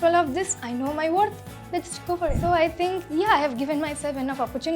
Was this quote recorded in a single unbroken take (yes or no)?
no